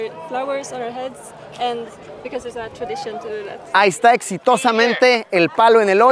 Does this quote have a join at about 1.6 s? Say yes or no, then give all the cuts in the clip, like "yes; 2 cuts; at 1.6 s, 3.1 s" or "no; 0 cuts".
no; 1 cut; at 3.7 s